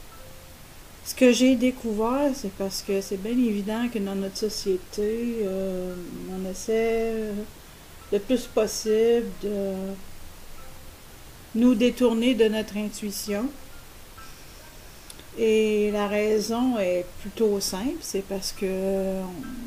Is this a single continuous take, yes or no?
yes